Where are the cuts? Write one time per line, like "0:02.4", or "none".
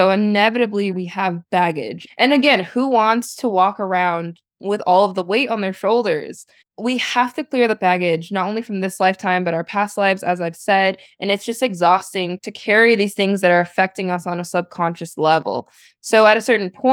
0:00.9